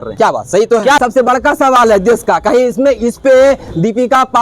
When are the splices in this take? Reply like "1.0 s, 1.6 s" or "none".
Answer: 1.0 s